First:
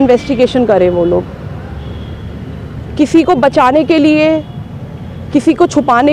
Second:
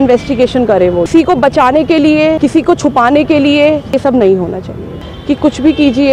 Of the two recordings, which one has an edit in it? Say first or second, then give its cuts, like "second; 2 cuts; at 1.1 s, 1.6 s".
second; 4 cuts; at 1.1 s, 2.4 s, 4.0 s, 5.0 s